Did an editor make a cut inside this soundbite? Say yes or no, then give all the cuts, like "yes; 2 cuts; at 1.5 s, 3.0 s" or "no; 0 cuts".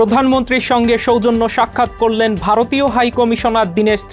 no; 0 cuts